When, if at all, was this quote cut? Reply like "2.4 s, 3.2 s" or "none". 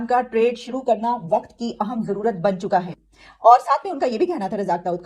none

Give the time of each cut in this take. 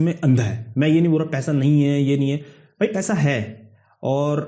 none

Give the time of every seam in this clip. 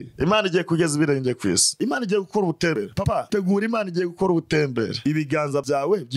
1.7 s, 5.0 s

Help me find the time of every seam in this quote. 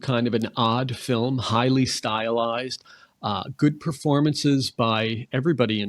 none

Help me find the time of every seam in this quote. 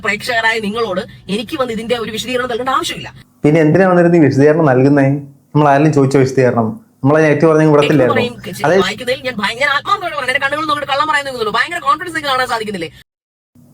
8.8 s

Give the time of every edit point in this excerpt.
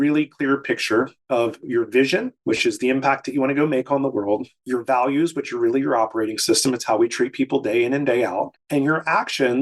1.2 s

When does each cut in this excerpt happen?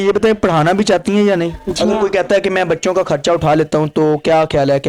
none

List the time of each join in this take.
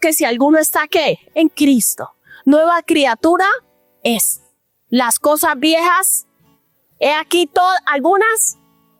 none

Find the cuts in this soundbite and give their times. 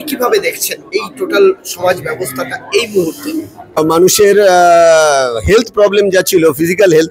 3.8 s

